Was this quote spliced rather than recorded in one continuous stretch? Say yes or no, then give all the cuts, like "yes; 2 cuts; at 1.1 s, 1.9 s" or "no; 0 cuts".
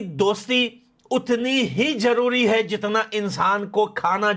no; 0 cuts